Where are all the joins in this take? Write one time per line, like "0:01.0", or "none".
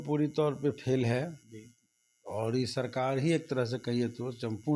none